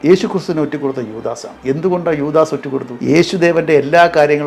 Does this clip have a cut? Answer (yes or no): yes